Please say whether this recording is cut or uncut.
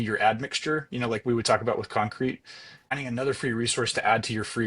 cut